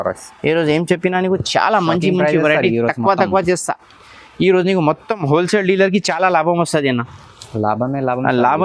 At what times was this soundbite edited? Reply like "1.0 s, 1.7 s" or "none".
none